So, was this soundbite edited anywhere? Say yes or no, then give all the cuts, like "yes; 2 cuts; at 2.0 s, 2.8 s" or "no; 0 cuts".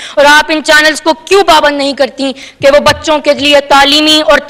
no; 0 cuts